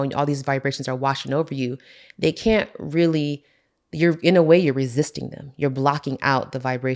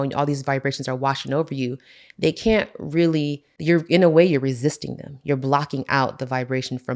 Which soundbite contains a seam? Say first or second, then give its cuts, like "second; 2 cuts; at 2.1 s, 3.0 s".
second; 1 cut; at 3.4 s